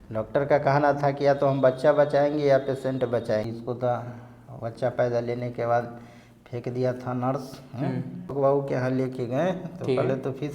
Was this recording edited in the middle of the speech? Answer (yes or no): yes